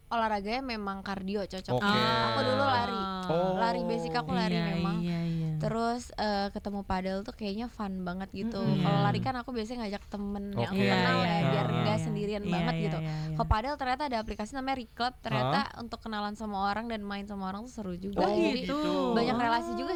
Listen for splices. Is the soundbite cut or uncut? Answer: uncut